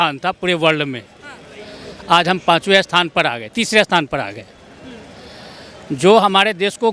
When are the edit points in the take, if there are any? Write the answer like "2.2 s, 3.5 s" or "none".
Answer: none

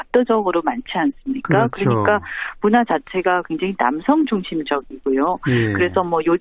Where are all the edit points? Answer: 5.4 s

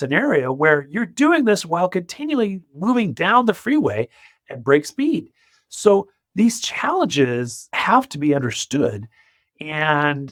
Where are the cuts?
none

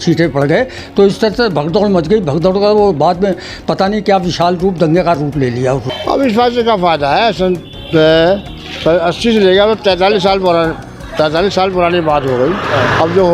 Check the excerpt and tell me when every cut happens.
5.9 s

